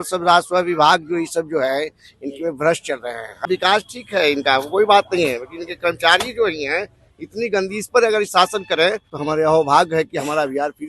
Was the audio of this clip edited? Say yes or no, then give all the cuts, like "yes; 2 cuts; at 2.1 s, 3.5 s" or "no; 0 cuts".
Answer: yes; 2 cuts; at 3.5 s, 9.1 s